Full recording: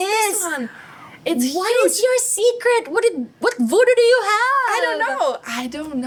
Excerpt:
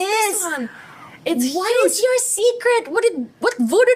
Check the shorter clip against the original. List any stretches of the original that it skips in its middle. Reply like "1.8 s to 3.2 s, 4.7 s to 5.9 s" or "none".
none